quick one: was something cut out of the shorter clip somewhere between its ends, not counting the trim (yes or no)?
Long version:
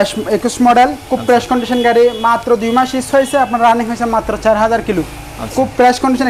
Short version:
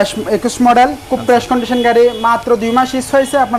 no